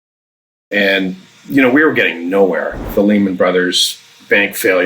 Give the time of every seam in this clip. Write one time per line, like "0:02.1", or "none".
0:02.8